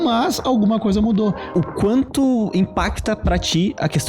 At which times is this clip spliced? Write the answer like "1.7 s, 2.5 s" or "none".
1.4 s